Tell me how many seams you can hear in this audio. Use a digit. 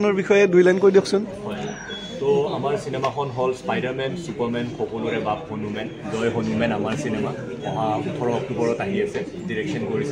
0